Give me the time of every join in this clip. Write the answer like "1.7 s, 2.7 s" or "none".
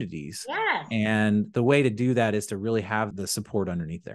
3.1 s